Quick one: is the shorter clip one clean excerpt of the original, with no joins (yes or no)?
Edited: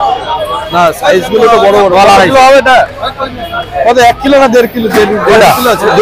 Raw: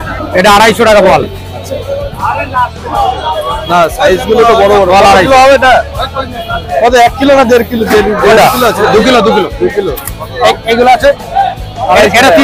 yes